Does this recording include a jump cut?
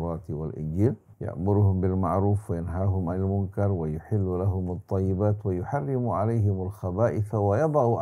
yes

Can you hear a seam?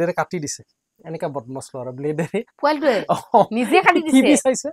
no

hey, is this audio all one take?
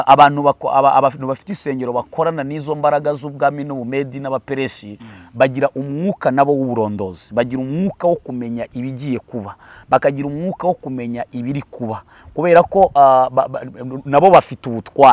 yes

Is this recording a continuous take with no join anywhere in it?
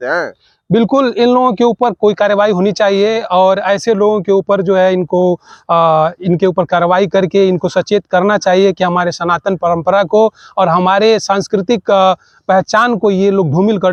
yes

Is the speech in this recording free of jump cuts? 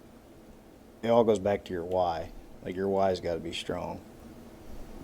no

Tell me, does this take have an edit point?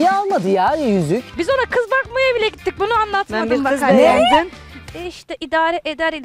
yes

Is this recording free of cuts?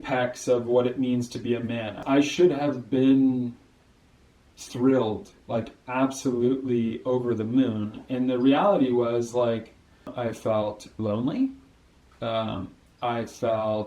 no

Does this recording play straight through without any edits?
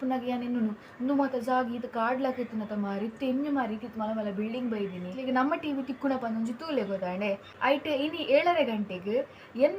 no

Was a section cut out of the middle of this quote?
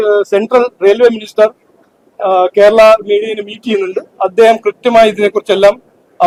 no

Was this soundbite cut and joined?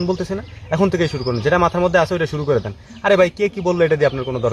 no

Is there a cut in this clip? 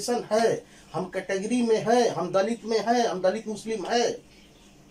no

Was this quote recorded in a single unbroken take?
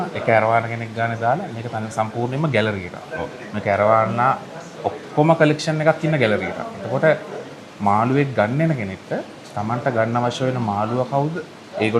yes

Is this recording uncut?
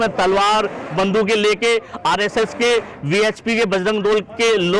yes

